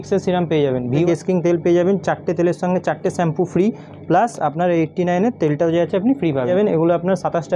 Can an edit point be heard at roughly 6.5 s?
yes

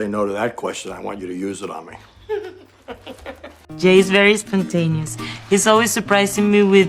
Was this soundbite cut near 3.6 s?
yes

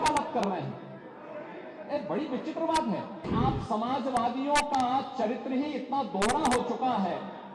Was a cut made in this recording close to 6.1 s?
no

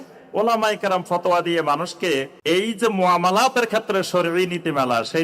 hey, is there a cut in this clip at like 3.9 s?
no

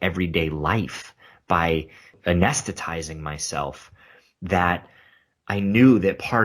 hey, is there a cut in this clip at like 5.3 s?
no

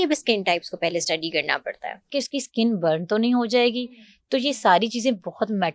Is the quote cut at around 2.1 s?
yes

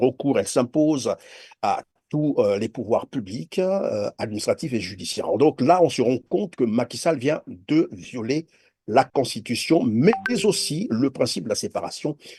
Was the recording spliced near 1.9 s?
no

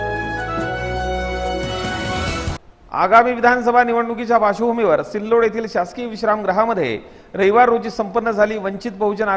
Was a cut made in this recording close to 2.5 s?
yes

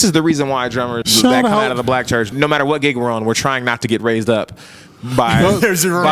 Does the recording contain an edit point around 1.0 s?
yes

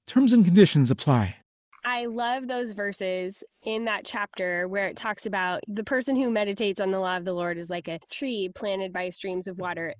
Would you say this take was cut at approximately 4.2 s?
no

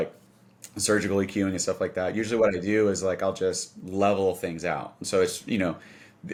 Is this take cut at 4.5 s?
no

